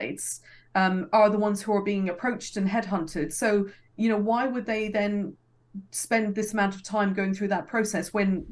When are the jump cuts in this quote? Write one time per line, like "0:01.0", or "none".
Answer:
none